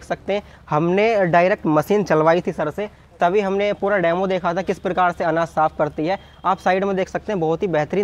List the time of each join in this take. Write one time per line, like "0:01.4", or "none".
none